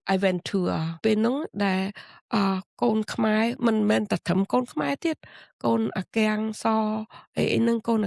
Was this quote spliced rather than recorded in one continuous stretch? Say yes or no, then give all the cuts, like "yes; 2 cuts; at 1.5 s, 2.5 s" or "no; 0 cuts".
yes; 1 cut; at 1.0 s